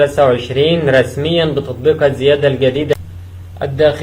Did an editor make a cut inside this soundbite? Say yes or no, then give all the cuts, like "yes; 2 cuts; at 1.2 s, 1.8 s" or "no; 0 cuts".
yes; 1 cut; at 2.9 s